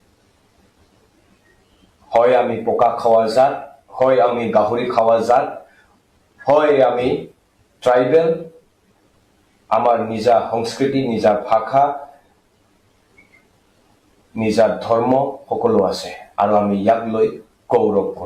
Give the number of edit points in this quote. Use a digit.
0